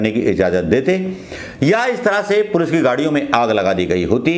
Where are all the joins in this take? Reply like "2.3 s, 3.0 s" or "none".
none